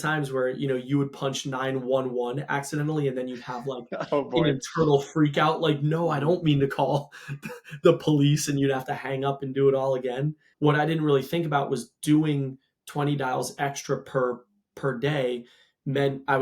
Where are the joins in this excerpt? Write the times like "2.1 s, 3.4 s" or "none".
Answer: 10.4 s